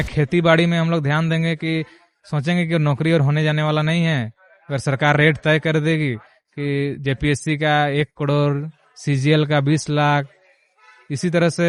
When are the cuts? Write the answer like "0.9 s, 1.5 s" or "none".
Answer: none